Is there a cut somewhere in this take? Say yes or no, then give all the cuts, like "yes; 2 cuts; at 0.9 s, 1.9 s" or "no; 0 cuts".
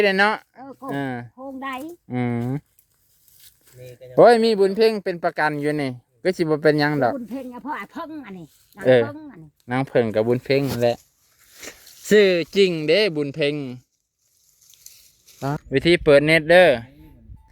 yes; 1 cut; at 15.6 s